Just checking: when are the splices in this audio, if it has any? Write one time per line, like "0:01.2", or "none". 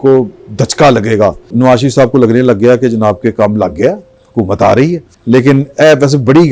0:01.5
0:05.1